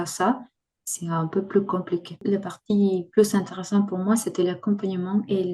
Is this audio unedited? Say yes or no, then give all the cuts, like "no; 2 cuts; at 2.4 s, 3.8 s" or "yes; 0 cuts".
no; 1 cut; at 2.2 s